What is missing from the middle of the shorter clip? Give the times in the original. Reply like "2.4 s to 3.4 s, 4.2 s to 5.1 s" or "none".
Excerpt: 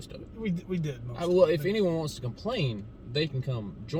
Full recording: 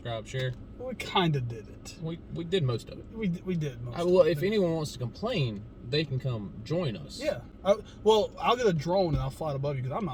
none